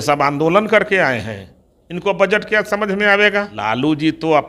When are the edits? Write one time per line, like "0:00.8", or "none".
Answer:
0:03.5